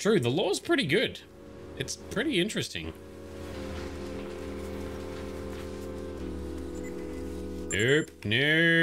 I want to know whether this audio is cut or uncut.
uncut